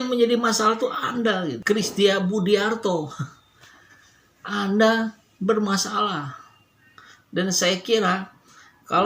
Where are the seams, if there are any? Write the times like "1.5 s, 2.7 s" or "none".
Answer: none